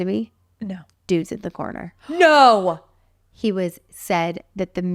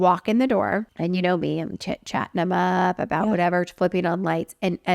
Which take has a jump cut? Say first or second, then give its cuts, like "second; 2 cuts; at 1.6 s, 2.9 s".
second; 1 cut; at 0.9 s